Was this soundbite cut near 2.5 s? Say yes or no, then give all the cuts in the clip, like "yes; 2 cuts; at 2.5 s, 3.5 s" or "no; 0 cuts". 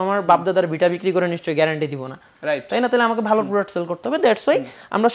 no; 0 cuts